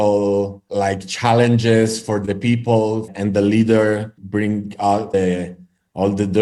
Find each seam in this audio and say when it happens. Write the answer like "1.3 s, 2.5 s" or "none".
3.1 s